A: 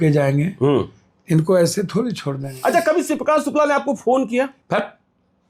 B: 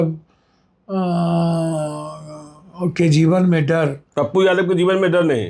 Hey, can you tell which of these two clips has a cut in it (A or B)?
A